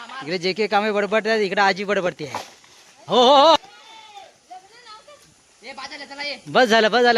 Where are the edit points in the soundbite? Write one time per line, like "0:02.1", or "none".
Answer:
0:03.6